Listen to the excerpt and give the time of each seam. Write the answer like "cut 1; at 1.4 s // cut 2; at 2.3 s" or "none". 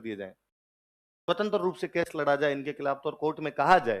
none